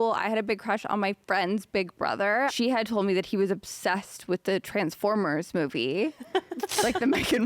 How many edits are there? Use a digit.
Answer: 1